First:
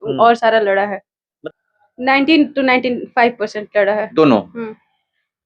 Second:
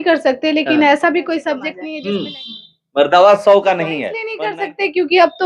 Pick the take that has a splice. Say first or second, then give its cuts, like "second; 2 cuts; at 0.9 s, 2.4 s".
first; 1 cut; at 1.3 s